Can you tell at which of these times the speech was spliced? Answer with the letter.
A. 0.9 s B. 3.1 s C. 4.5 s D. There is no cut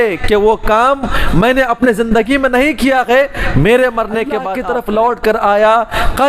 C